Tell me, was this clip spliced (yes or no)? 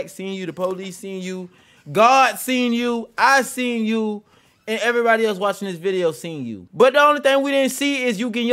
yes